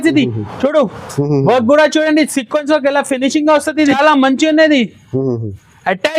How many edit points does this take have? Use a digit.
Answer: 1